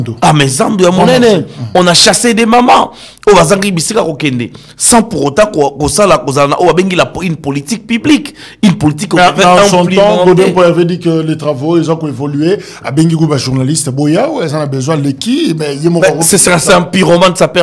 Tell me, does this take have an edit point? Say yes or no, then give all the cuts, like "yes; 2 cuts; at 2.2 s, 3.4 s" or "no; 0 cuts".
no; 0 cuts